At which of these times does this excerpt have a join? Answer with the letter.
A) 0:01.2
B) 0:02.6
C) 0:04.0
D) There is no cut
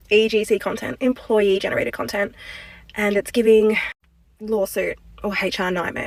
D